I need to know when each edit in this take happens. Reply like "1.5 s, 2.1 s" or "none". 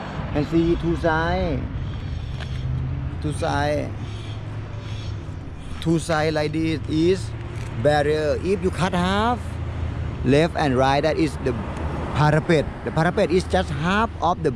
none